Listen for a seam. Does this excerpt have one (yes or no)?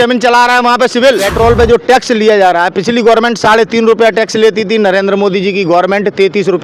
yes